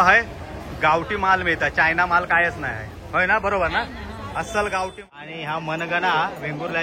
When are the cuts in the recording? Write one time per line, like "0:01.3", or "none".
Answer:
0:05.0